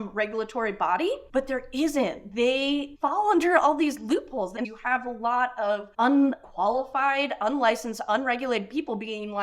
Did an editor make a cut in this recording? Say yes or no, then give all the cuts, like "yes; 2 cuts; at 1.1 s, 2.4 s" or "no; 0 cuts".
yes; 2 cuts; at 4.5 s, 5.9 s